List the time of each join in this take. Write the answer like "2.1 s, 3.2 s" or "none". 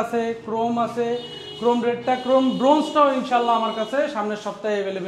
none